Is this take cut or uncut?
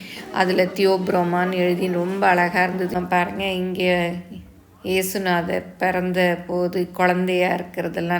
cut